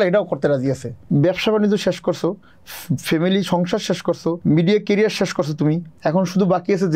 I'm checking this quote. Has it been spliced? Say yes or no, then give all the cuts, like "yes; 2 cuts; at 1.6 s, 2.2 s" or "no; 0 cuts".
yes; 3 cuts; at 0.9 s, 4.4 s, 5.9 s